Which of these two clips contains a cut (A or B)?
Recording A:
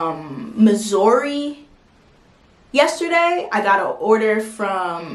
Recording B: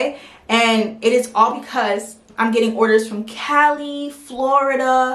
B